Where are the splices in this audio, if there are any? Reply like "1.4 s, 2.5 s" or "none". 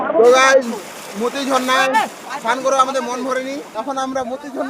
3.7 s